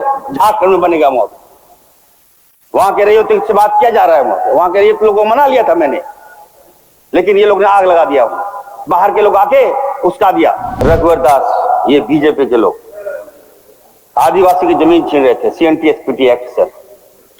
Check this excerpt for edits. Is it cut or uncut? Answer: cut